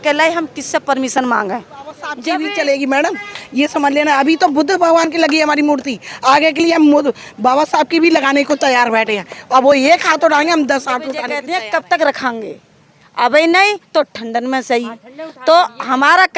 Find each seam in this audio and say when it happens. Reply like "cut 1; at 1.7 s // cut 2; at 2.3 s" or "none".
cut 1; at 2.2 s // cut 2; at 11.3 s